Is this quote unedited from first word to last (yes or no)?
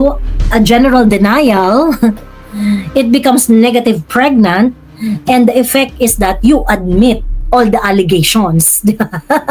yes